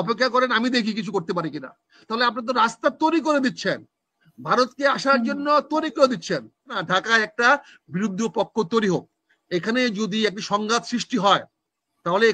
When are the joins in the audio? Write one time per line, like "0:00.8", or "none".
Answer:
0:06.8